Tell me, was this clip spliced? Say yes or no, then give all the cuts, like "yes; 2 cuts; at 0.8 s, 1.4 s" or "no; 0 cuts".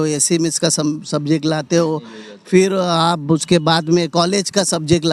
no; 0 cuts